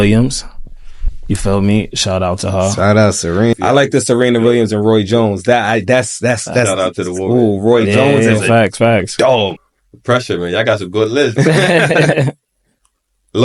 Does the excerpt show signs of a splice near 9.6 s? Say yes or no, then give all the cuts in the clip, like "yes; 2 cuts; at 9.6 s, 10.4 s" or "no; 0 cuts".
yes; 2 cuts; at 3.5 s, 9.6 s